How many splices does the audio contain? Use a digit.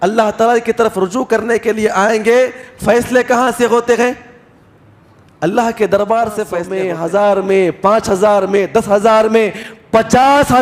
1